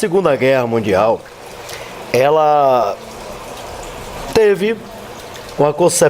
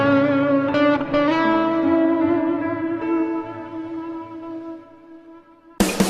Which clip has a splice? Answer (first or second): first